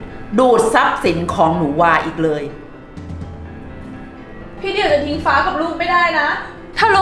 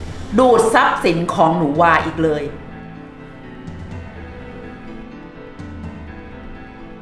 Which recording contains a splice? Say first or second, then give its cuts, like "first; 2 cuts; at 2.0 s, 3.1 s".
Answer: first; 2 cuts; at 3.1 s, 4.5 s